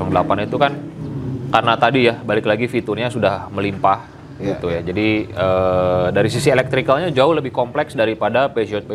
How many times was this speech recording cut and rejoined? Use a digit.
0